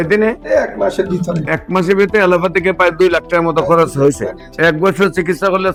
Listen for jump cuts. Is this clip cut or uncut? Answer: uncut